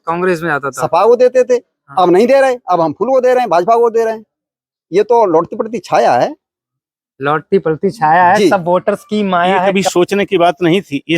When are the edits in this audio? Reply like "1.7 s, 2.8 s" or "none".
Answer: 9.7 s

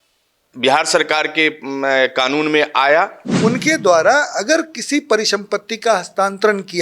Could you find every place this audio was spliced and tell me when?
3.2 s

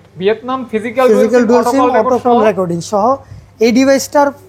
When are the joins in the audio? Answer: none

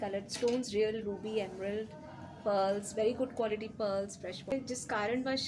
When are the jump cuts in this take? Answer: 4.5 s

